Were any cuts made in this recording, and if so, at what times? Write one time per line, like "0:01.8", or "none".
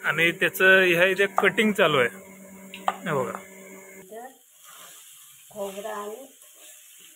0:04.1